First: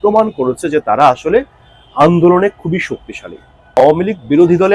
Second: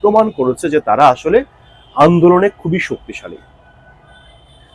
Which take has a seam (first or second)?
first